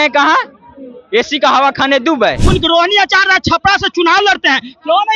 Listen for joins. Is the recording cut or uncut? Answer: cut